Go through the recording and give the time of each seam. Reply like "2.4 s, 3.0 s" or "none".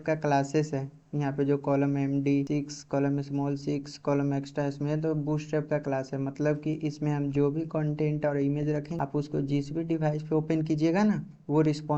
8.9 s